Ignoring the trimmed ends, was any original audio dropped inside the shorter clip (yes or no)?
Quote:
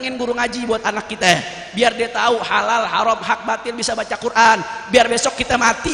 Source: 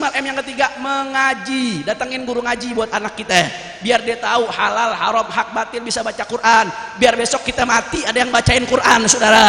no